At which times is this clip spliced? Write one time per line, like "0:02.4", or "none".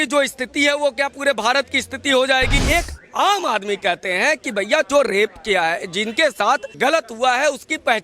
0:02.6
0:06.7